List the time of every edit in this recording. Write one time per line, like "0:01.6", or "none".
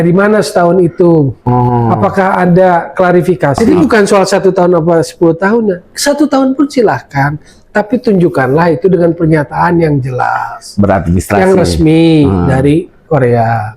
0:03.7